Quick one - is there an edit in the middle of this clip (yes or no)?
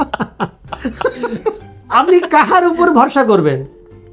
yes